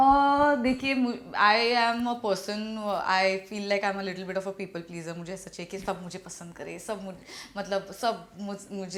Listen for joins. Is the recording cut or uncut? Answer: uncut